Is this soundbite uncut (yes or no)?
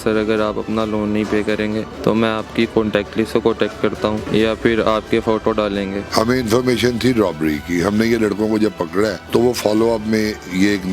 no